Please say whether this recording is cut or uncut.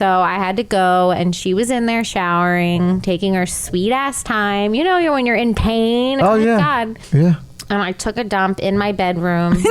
cut